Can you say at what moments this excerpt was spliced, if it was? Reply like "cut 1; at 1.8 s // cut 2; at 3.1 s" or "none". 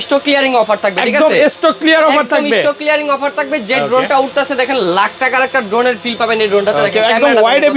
none

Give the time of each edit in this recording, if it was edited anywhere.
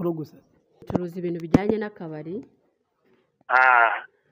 cut 1; at 1.1 s

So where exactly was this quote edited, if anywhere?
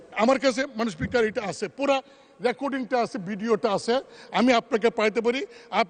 none

